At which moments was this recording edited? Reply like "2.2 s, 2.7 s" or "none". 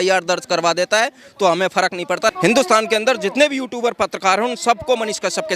2.3 s